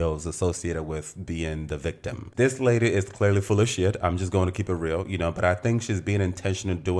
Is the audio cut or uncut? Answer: cut